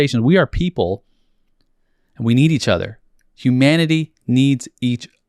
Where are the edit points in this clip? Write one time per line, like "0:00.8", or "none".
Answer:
none